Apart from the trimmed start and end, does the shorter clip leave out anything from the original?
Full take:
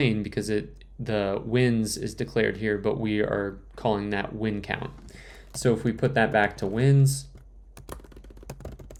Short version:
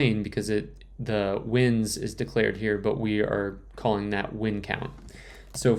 no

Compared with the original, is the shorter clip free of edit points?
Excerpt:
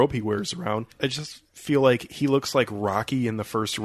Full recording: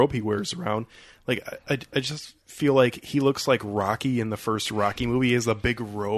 no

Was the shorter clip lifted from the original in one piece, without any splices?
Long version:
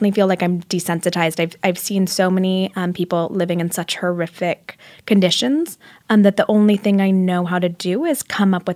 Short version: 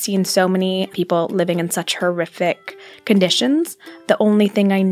no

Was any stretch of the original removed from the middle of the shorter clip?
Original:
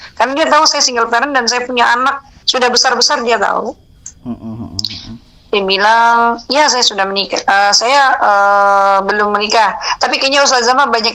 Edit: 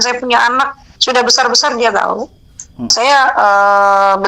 yes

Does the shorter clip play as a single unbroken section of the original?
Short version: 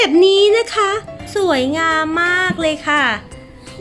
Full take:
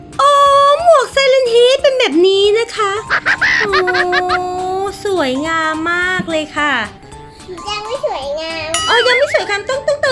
no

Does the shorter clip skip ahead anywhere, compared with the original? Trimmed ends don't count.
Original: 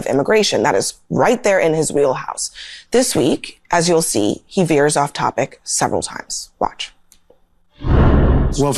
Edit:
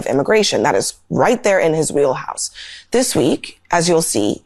no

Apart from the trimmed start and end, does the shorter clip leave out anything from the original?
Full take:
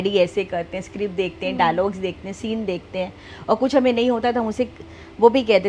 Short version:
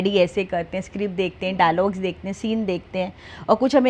no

